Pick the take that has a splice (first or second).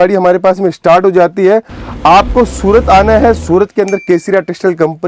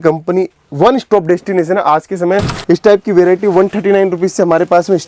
second